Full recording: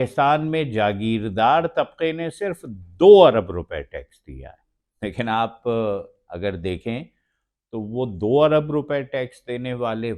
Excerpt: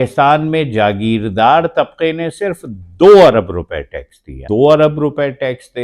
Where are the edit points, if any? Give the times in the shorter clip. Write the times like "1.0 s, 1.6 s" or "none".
4.4 s